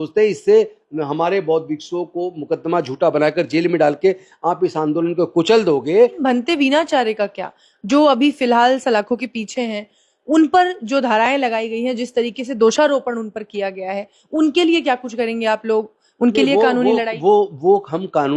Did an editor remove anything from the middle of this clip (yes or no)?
yes